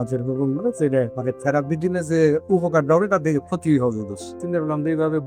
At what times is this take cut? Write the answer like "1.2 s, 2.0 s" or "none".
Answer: 1.1 s, 4.4 s

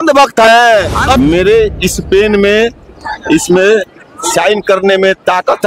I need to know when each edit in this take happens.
1.0 s

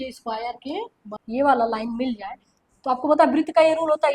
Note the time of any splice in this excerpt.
1.1 s

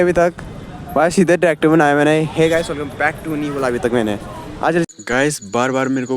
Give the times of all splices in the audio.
4.9 s

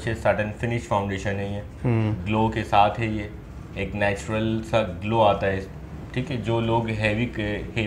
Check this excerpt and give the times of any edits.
none

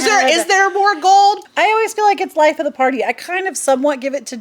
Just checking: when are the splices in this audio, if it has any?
1.4 s

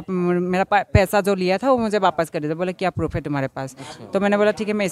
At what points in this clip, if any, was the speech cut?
none

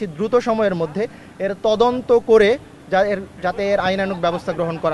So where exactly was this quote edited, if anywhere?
none

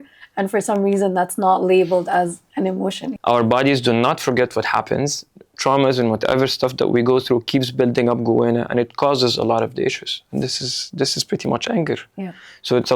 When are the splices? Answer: 3.1 s

